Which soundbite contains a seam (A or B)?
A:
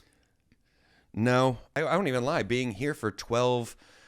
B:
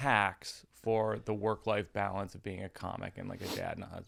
A